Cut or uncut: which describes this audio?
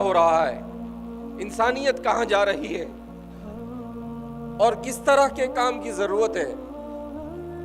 cut